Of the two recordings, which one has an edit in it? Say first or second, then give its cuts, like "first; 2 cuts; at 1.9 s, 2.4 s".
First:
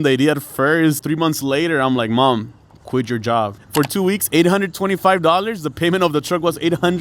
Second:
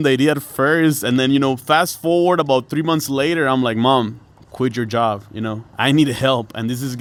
first; 2 cuts; at 1.0 s, 3.6 s